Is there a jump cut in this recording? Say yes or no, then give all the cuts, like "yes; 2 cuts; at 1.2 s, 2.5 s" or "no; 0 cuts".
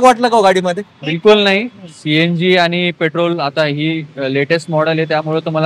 no; 0 cuts